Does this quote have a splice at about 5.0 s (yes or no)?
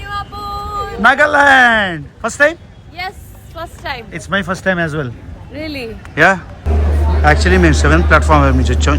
no